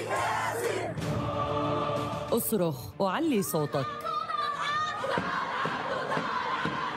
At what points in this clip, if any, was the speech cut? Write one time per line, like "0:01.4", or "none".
0:04.3